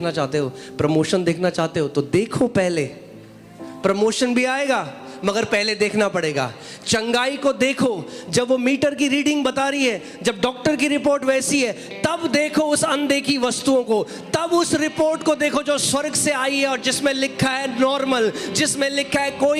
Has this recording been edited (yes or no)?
no